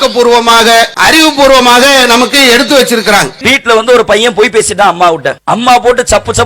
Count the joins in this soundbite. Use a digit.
3